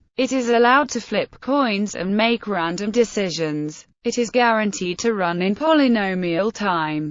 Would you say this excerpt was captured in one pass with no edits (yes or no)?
no